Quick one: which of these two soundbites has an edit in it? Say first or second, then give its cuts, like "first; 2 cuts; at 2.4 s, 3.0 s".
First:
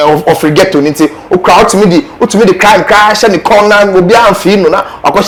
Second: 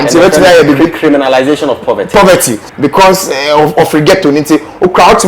second; 1 cut; at 2.6 s